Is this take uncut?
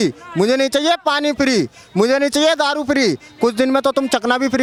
yes; 0 cuts

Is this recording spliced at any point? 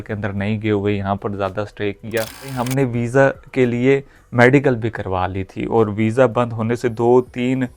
yes; 1 cut; at 2.6 s

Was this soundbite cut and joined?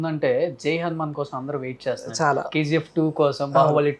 no; 0 cuts

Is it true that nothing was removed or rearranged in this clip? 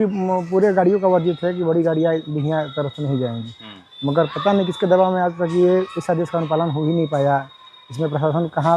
yes; 0 cuts

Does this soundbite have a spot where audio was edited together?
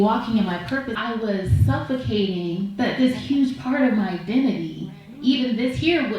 yes; 1 cut; at 0.9 s

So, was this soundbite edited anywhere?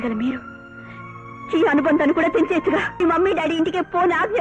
yes; 1 cut; at 3.0 s

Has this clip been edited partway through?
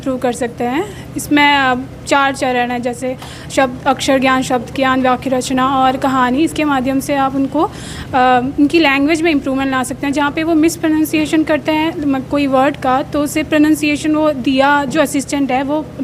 no; 0 cuts

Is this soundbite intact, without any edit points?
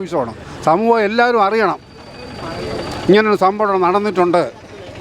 yes; 0 cuts

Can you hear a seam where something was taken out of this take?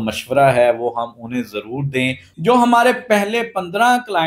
yes; 1 cut; at 2.2 s

